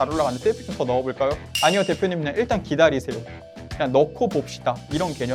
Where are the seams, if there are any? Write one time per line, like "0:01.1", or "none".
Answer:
none